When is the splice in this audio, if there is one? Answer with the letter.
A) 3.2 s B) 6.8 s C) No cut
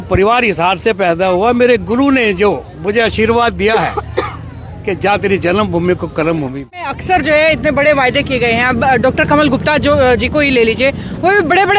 B